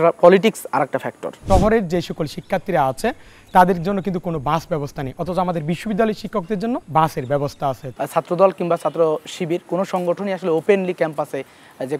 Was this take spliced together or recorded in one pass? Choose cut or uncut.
cut